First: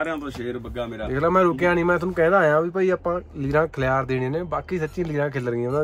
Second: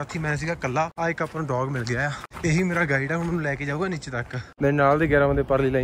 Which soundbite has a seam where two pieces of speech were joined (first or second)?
second